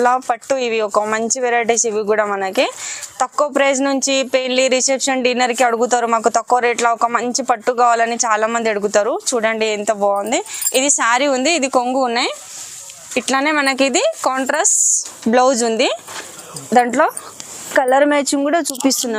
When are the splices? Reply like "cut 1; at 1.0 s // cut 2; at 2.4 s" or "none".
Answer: none